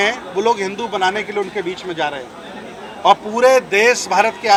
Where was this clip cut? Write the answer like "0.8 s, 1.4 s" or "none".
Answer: none